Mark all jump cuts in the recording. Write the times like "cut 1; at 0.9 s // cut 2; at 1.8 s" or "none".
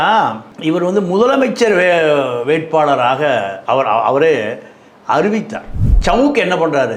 cut 1; at 5.8 s

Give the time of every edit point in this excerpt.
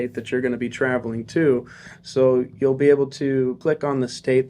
cut 1; at 3.6 s

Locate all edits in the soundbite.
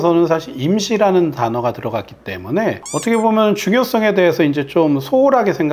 none

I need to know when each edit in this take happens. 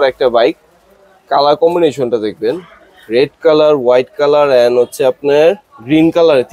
none

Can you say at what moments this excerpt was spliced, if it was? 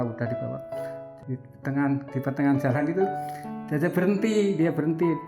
cut 1; at 1.1 s

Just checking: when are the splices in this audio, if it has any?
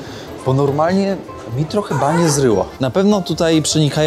cut 1; at 2.7 s

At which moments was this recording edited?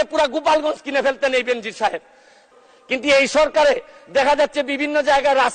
cut 1; at 2.5 s

